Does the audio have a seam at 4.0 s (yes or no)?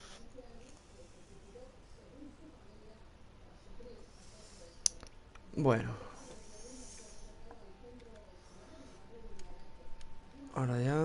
no